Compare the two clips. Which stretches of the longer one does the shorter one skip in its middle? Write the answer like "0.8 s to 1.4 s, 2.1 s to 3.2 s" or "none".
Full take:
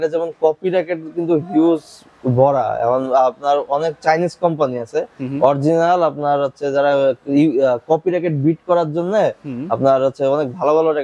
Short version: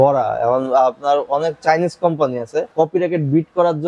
5.1 s to 7.8 s